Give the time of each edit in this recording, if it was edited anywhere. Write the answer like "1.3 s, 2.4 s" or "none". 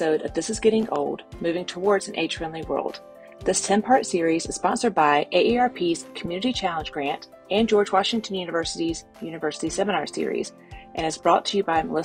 none